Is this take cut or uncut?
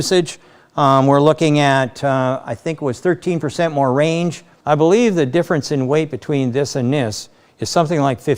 cut